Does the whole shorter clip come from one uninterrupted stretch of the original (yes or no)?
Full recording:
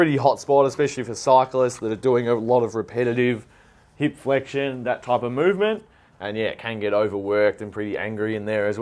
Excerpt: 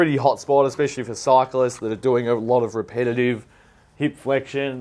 yes